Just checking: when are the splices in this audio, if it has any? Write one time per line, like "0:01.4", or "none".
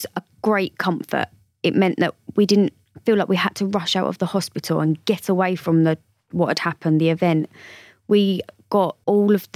none